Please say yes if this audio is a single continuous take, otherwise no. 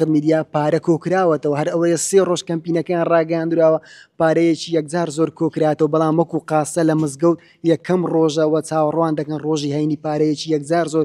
yes